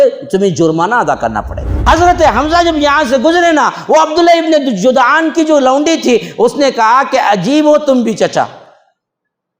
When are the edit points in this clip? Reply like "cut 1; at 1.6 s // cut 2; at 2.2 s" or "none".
cut 1; at 1.7 s